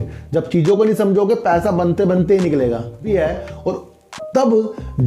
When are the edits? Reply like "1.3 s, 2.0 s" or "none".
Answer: 3.1 s